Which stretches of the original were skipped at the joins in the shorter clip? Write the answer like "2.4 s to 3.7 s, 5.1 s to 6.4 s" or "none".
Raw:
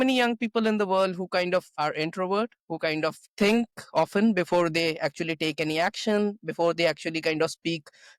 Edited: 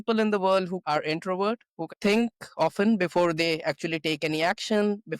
1.3 s to 1.7 s, 2.8 s to 3.2 s